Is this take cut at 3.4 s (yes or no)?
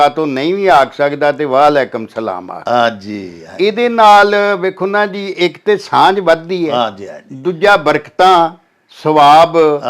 no